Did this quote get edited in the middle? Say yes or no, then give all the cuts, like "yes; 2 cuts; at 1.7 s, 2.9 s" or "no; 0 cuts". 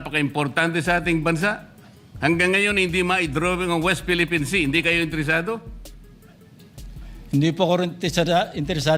no; 0 cuts